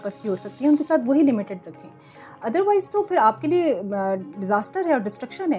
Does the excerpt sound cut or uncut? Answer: uncut